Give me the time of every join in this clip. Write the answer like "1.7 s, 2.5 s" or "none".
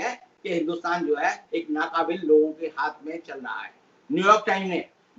none

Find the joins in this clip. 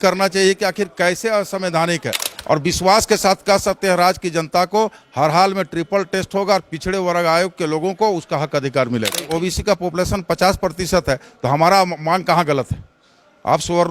2.3 s, 9.3 s

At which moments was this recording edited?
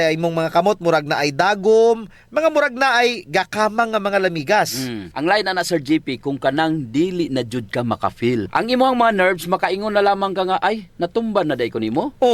none

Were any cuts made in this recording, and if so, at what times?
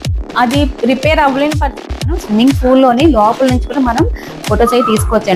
2.1 s

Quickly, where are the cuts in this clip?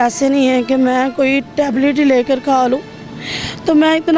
none

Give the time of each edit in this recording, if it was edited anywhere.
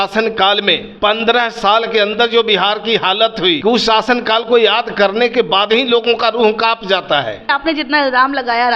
0.9 s, 3.6 s, 7.5 s

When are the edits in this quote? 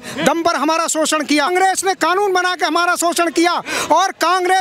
1.5 s

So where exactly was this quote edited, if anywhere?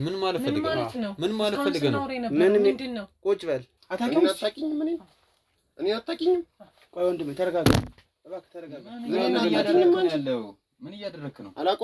3.8 s

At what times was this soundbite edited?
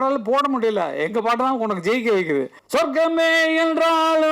2.6 s

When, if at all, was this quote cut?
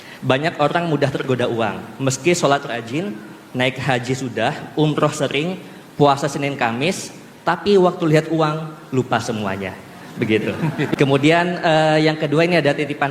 10.9 s

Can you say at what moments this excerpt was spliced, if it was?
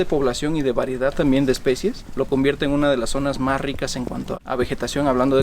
2.1 s, 4.3 s

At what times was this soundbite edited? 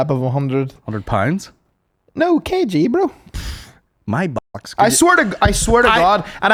none

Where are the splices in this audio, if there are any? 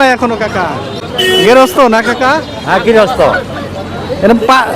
none

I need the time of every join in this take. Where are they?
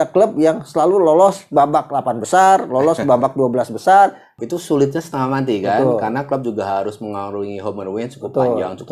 4.3 s

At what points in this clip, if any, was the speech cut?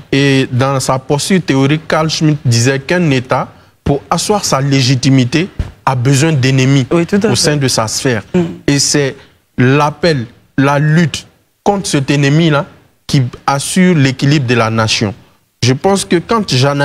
none

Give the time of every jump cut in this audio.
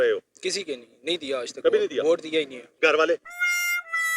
2.6 s

